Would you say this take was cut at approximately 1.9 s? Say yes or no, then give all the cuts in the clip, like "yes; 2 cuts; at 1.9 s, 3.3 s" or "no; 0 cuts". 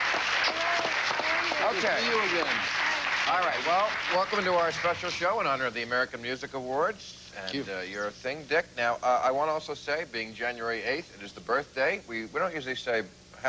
yes; 1 cut; at 1.9 s